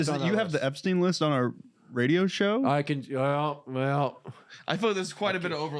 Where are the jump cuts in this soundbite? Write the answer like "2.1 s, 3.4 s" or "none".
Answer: none